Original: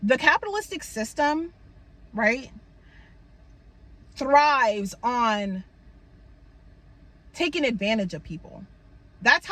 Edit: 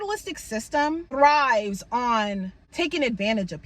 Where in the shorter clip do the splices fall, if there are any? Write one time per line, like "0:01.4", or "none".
0:01.1
0:02.6